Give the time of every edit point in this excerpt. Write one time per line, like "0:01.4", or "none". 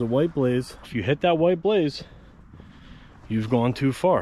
0:00.9